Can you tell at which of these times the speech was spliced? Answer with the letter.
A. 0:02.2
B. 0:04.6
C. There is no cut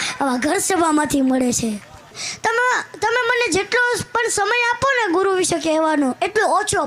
A